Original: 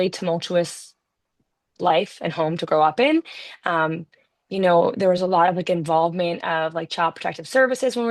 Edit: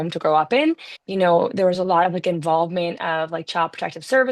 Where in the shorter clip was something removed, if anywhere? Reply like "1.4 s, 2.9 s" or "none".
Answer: 0.9 s